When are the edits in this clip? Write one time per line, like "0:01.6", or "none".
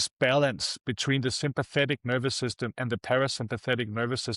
none